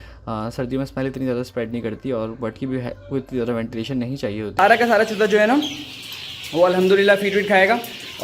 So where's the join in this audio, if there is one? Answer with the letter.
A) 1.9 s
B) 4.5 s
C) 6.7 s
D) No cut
B